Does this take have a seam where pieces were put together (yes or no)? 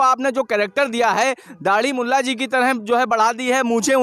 no